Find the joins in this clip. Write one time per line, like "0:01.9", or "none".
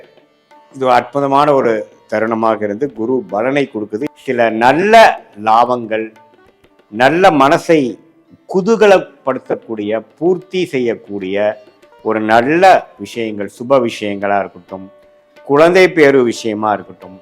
0:04.0